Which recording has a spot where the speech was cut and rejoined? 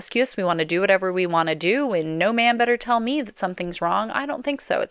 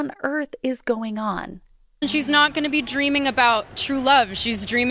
second; 1 cut; at 2.0 s

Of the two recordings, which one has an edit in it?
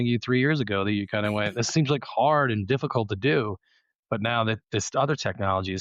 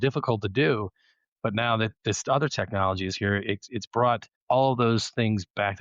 second; 1 cut; at 4.3 s

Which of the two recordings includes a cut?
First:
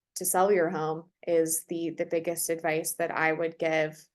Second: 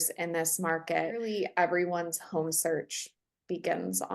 second; 1 cut; at 1.3 s

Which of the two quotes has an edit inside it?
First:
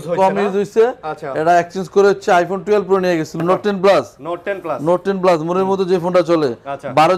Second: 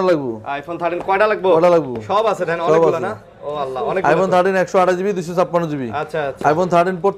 first; 1 cut; at 3.4 s

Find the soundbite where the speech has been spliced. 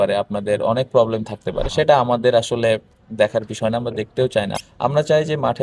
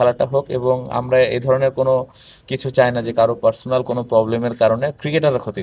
first; 1 cut; at 4.6 s

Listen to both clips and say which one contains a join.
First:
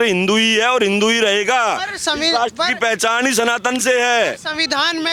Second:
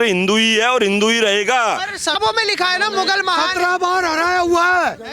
second; 1 cut; at 2.2 s

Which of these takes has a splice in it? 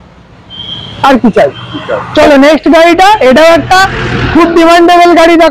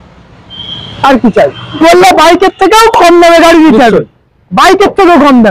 second; 1 cut; at 1.8 s

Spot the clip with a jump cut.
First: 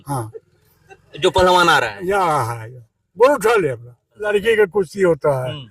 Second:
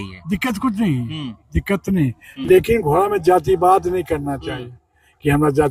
first; 1 cut; at 4.2 s

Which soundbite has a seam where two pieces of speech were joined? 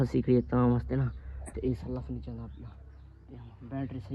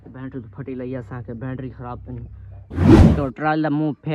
second; 2 cuts; at 2.7 s, 3.2 s

